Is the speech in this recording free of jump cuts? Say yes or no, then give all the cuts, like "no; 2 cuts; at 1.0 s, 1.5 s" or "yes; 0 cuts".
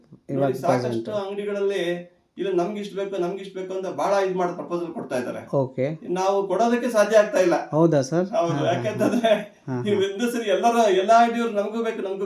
yes; 0 cuts